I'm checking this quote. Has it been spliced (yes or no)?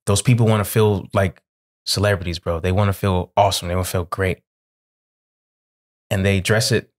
no